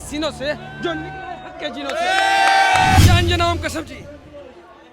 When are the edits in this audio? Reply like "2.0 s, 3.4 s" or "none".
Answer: 3.0 s